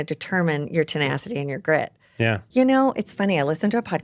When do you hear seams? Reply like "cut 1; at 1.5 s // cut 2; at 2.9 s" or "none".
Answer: cut 1; at 2.4 s